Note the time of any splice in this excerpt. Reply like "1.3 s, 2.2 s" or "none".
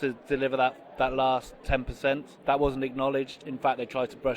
1.9 s, 3.4 s